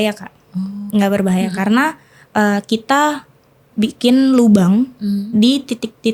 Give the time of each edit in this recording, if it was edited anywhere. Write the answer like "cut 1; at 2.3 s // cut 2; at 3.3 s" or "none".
none

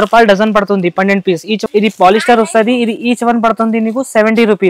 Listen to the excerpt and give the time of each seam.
cut 1; at 1.5 s

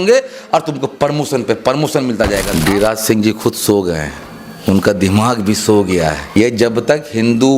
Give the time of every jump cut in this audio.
cut 1; at 2.5 s // cut 2; at 6.2 s

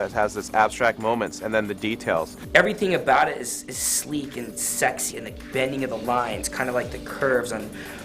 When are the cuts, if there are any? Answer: cut 1; at 2.4 s // cut 2; at 5.1 s

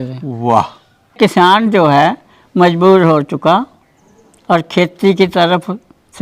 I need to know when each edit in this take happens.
cut 1; at 1.2 s

